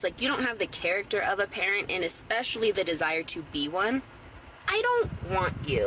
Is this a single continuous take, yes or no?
yes